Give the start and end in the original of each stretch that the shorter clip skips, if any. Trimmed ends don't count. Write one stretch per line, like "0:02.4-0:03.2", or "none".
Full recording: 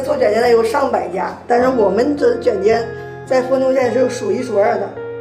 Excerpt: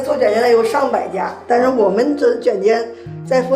none